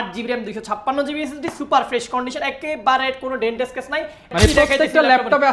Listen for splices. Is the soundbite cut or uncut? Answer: cut